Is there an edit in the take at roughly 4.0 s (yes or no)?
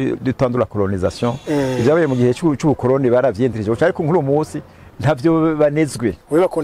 no